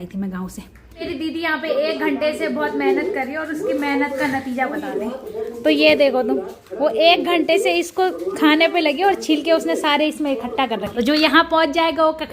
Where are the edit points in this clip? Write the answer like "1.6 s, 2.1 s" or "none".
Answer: 1.0 s, 10.9 s